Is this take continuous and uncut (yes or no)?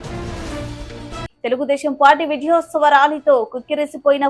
no